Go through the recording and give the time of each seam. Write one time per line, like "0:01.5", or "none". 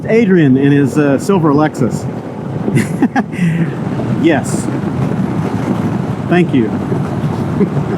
0:03.8